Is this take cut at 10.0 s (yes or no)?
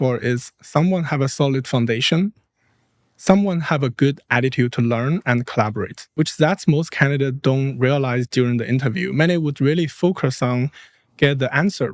no